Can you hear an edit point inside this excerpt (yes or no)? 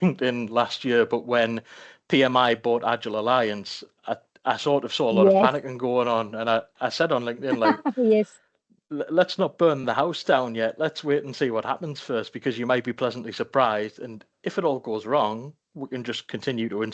no